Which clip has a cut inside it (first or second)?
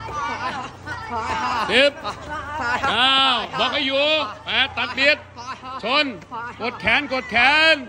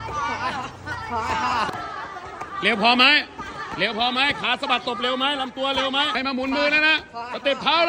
second